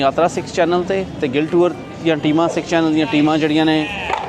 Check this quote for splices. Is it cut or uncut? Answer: uncut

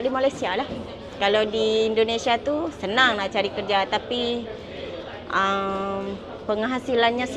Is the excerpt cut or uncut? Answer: uncut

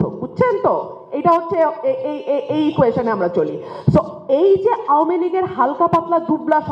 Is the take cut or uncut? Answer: uncut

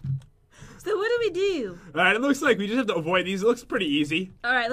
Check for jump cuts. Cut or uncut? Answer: cut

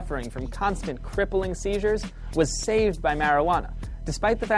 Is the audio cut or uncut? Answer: uncut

